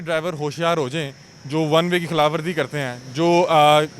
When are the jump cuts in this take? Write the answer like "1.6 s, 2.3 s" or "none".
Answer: none